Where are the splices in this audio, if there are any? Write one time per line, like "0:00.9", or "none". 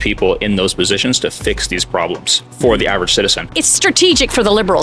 0:03.5

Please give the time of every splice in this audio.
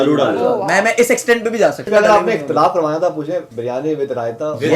0:01.8
0:03.5

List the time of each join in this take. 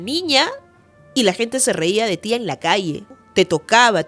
0:03.1

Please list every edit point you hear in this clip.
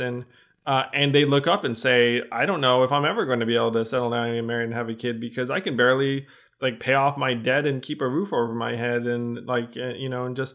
none

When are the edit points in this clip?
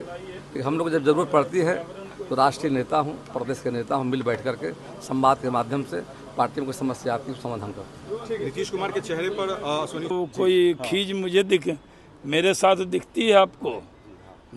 0:10.1

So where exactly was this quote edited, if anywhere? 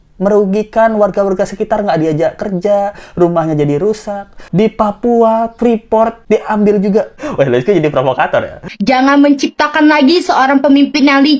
0:08.7

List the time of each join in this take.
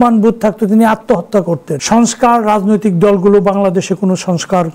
0:01.7

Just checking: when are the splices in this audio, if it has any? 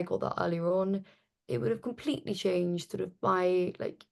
none

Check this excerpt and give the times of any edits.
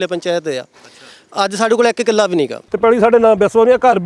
0:02.6

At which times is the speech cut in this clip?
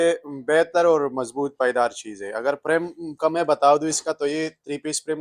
none

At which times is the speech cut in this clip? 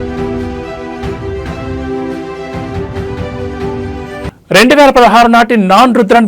none

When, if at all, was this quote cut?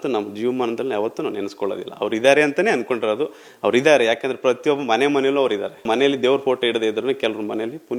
none

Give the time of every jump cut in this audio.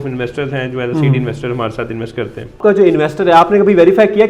0:02.6

